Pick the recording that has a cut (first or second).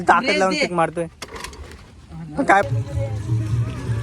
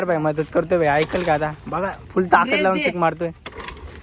first